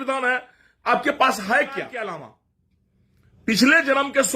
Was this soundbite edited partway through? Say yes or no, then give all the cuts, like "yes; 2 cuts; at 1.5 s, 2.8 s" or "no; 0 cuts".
yes; 1 cut; at 1.9 s